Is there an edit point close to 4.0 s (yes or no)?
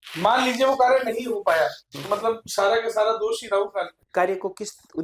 yes